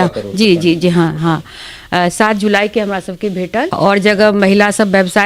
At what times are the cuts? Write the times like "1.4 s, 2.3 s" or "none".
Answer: 3.7 s